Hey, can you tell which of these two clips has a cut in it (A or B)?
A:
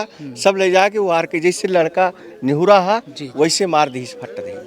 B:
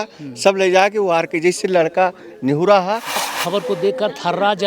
B